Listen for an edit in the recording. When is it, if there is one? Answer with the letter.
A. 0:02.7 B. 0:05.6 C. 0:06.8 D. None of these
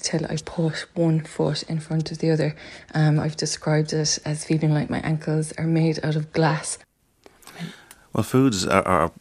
D